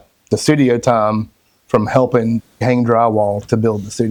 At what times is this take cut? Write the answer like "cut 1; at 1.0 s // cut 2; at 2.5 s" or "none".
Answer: none